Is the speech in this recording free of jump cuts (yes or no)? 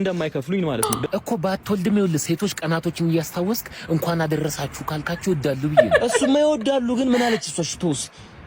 no